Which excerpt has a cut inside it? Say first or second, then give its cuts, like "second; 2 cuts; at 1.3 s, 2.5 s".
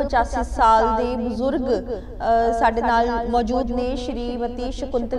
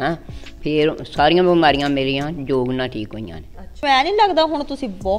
second; 1 cut; at 3.8 s